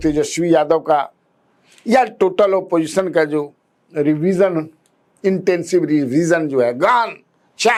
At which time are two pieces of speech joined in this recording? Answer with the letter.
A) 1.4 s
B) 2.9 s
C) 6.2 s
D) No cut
D